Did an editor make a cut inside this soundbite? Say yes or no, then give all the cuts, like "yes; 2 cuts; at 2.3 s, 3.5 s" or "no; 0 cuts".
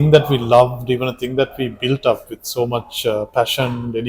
no; 0 cuts